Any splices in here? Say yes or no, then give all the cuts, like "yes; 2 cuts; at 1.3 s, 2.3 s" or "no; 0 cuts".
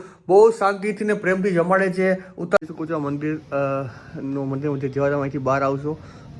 yes; 1 cut; at 2.6 s